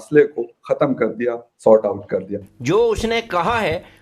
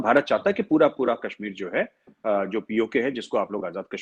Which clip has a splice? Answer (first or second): first